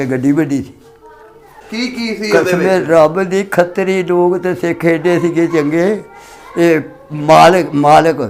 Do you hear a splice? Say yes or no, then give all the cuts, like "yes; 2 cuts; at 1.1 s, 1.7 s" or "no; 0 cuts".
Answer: yes; 1 cut; at 1.5 s